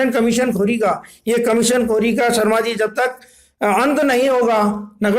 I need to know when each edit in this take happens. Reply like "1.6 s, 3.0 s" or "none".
none